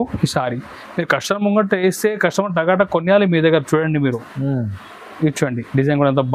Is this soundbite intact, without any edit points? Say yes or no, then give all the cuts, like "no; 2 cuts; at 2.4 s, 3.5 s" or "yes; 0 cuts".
yes; 0 cuts